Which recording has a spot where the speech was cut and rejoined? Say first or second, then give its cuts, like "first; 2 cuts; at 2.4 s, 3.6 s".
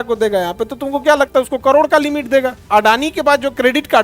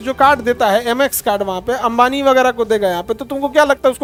first; 1 cut; at 2.6 s